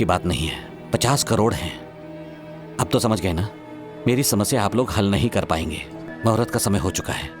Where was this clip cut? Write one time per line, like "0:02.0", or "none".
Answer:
0:06.1